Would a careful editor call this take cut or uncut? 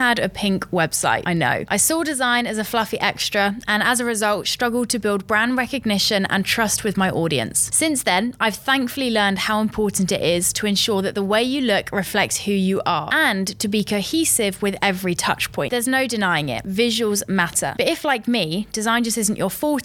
uncut